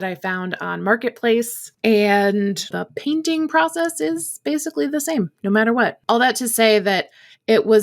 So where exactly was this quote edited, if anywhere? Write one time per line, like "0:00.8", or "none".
0:01.6
0:02.8
0:06.0